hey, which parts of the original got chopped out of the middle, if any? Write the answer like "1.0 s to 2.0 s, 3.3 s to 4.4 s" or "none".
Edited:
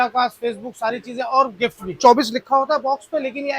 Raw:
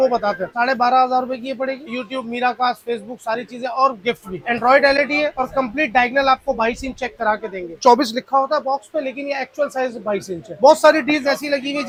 4.3 s to 7.7 s